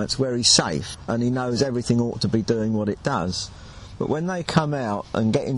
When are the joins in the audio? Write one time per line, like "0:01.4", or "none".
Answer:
0:00.9